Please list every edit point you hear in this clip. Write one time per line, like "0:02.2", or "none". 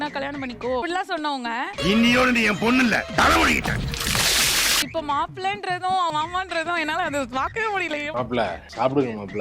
0:04.8
0:08.1